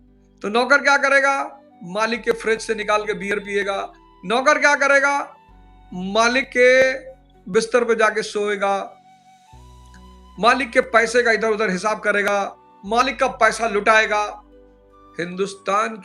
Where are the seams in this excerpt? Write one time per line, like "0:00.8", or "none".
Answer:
none